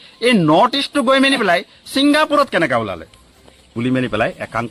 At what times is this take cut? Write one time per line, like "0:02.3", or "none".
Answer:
0:03.6